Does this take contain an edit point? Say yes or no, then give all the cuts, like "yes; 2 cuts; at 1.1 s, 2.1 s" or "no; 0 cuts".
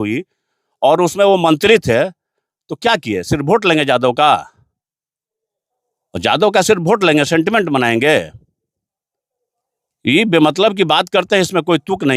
no; 0 cuts